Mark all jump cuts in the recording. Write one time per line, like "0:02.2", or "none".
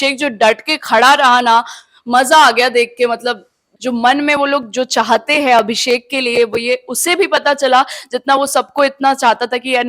0:03.6